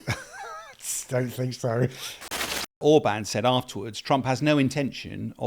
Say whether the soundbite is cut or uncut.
cut